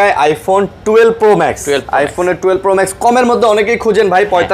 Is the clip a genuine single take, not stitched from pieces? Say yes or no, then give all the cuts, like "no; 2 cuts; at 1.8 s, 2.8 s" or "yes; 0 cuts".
yes; 0 cuts